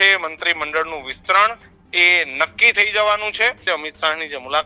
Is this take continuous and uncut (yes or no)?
no